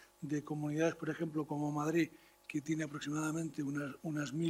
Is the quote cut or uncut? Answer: uncut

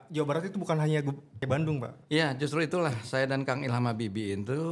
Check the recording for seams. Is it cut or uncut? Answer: cut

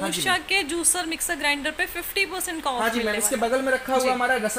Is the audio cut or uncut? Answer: uncut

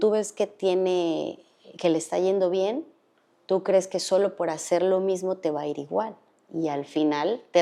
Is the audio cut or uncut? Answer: uncut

